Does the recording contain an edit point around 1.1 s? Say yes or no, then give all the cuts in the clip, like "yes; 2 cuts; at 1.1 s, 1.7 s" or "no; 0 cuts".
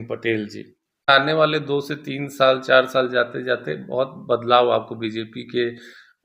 yes; 1 cut; at 1.1 s